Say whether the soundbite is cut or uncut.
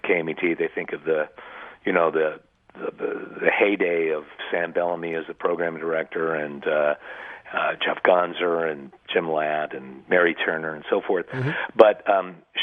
uncut